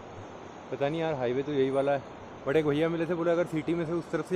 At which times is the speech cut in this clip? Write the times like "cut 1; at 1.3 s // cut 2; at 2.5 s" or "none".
none